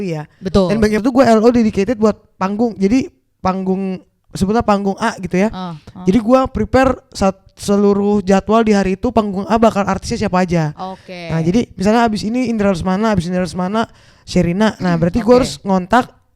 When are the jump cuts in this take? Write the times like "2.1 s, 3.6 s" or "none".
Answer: 1.0 s